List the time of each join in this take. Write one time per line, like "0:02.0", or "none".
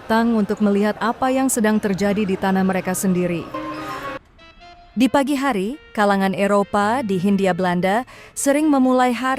0:04.2